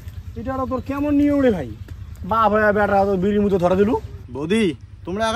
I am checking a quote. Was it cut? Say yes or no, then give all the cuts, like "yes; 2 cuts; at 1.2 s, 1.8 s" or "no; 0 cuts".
yes; 1 cut; at 4.2 s